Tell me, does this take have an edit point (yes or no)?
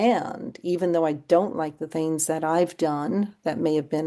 no